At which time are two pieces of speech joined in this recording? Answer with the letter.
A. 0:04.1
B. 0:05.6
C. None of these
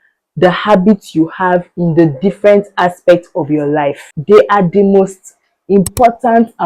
A